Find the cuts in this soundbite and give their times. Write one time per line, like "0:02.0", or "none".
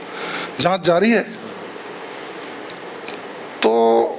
none